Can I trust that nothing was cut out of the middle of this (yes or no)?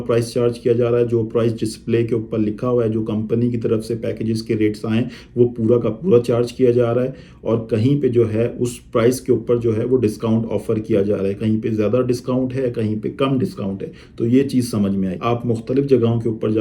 yes